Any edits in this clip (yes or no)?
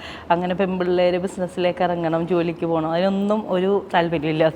no